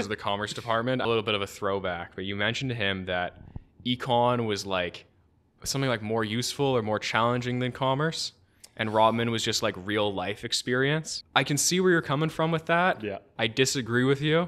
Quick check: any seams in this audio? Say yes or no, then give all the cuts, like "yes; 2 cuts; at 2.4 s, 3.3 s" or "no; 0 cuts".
yes; 2 cuts; at 1.0 s, 11.2 s